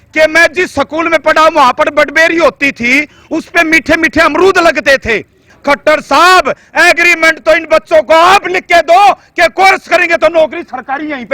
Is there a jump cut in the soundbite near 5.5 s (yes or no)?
yes